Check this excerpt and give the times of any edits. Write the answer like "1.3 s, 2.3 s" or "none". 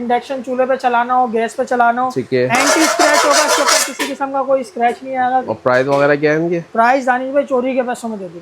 5.5 s